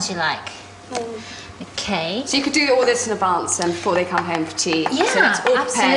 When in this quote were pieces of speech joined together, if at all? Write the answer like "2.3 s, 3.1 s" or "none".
none